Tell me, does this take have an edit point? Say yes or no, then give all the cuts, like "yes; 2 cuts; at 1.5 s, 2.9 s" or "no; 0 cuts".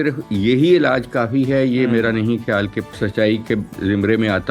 yes; 2 cuts; at 2.9 s, 3.7 s